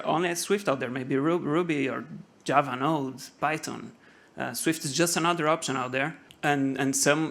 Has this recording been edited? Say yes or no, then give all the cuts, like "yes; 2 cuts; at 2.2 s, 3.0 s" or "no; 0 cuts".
yes; 1 cut; at 6.2 s